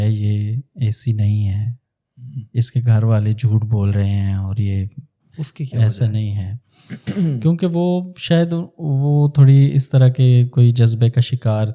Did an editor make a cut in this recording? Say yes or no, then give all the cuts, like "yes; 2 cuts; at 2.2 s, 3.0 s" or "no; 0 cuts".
no; 0 cuts